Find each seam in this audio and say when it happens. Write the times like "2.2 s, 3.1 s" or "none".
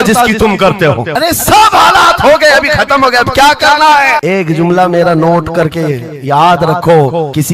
none